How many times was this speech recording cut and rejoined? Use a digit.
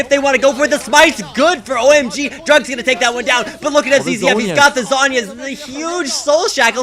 0